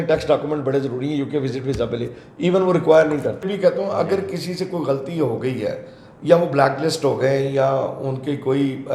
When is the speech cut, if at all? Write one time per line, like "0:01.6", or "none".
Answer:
0:03.4